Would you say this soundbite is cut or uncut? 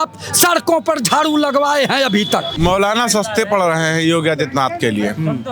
cut